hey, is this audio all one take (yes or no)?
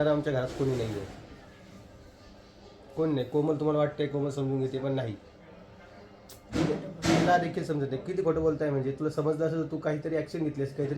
yes